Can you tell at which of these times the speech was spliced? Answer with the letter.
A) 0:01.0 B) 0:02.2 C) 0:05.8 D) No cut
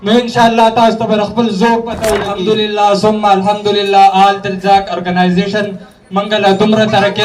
B